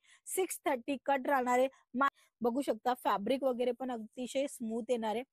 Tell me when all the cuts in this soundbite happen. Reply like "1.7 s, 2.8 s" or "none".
2.1 s